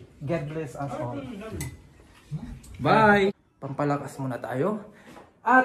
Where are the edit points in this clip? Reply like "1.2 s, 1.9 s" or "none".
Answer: 3.5 s